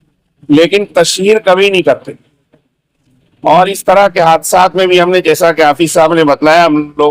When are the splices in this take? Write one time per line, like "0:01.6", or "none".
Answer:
none